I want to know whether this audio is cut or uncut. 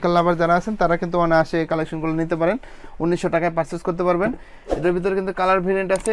uncut